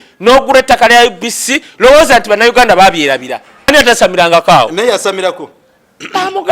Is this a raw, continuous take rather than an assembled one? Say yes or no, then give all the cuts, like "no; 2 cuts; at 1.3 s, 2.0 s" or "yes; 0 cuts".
no; 1 cut; at 3.7 s